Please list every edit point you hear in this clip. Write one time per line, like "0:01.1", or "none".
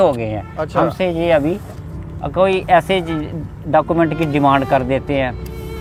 none

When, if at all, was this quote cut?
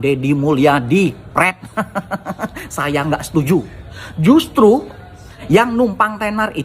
0:05.3

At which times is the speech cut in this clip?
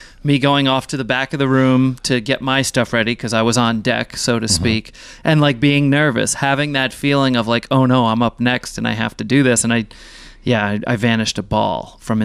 none

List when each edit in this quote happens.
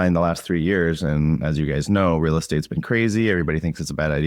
none

